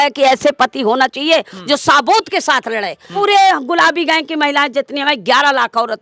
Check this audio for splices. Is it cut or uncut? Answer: cut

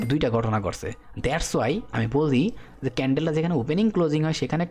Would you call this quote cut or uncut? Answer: uncut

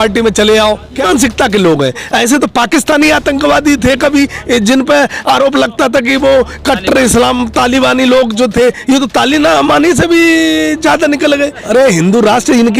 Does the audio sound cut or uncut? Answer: cut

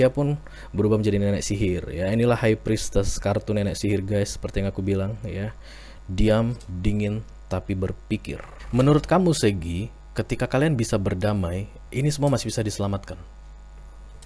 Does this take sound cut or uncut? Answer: cut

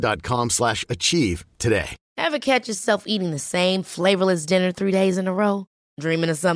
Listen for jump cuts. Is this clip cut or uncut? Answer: cut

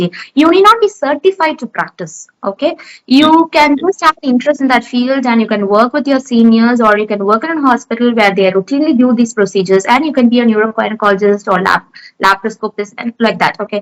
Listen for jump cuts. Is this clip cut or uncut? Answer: uncut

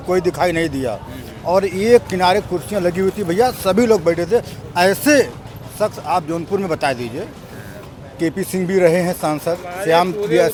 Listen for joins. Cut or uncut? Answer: uncut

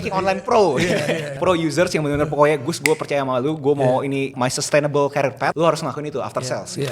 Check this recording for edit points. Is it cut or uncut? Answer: cut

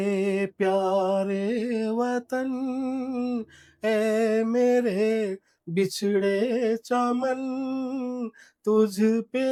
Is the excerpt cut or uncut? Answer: uncut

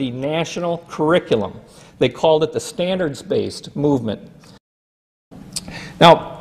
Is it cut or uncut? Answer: cut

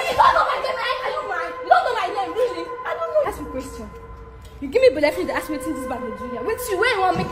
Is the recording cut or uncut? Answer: cut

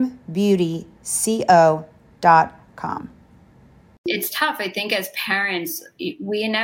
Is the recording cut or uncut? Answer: cut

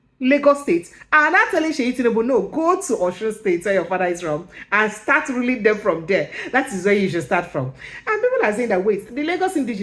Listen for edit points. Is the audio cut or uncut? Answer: uncut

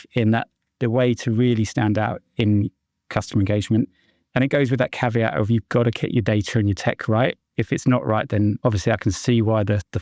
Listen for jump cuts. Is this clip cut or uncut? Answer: uncut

